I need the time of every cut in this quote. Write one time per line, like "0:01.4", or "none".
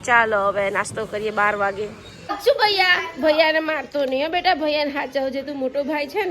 0:02.3